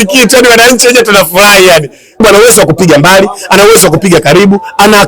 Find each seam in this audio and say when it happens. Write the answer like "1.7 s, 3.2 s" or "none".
2.2 s